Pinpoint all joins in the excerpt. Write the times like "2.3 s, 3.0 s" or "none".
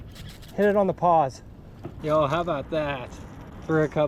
1.9 s

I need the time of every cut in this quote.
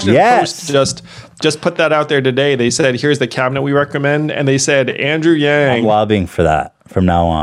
5.8 s

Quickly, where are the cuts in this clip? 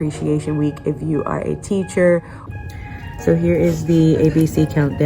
2.4 s

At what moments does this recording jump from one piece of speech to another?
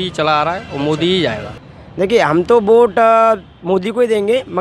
1.6 s

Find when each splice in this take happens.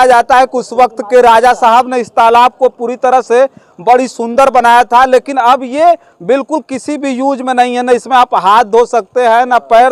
none

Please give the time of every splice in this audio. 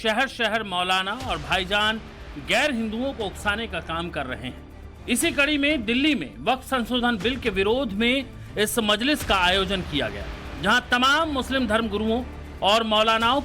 3.4 s

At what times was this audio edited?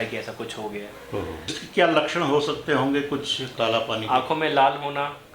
1.5 s

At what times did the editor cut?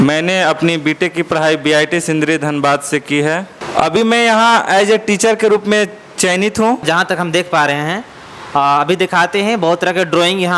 3.6 s, 6.8 s

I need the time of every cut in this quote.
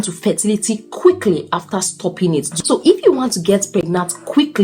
2.5 s

